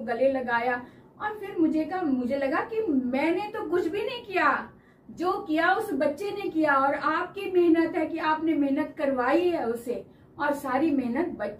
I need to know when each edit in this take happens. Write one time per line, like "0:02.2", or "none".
none